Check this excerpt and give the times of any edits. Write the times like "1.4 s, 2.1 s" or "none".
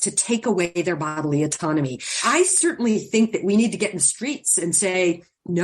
2.1 s

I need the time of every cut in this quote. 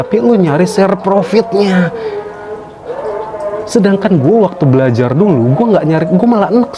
none

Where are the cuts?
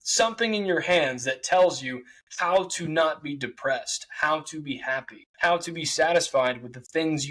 5.2 s

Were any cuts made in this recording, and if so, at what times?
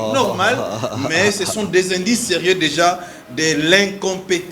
none

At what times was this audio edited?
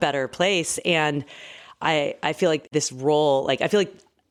none

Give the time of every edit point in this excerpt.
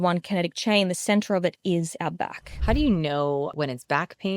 2.5 s, 3.5 s

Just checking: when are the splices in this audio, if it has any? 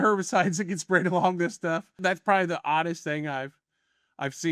2.0 s

